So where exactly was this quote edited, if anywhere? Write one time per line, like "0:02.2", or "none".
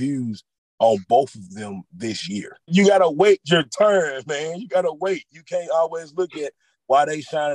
0:02.7

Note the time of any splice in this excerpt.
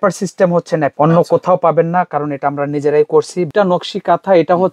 0:00.9
0:03.5

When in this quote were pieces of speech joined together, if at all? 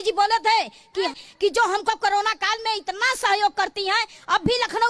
0:01.1

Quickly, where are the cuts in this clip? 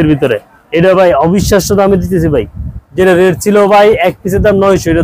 none

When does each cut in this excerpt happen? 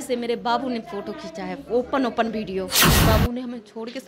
0:03.0

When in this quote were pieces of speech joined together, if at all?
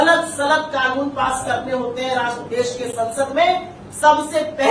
none

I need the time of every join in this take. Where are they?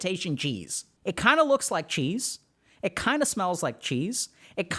0:00.9

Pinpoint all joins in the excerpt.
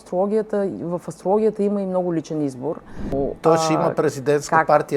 0:03.1

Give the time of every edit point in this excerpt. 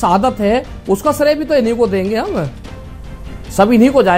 none

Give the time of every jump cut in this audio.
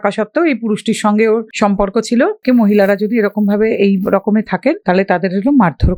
0:01.5
0:02.4
0:04.8

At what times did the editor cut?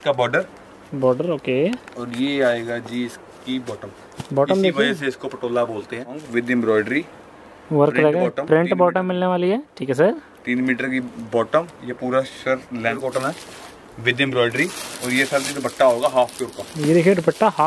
0:06.2
0:13.0

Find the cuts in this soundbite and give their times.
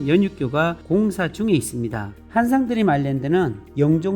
0:02.1

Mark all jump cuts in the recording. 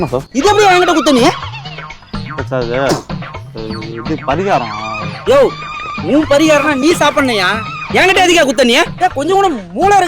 0:08.9

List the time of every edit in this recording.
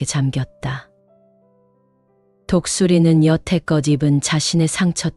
0:00.9
0:02.5

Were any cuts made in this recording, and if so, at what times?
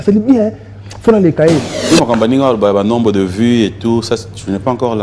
0:01.7

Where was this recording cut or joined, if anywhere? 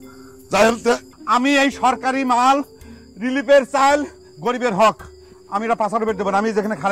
0:01.1

